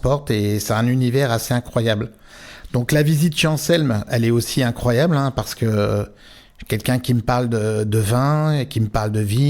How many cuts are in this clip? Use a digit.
0